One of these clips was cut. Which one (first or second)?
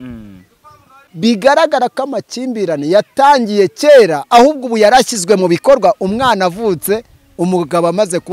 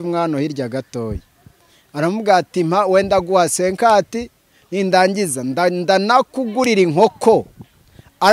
first